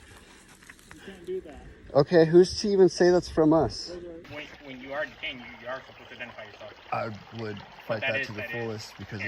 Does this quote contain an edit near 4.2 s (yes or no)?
yes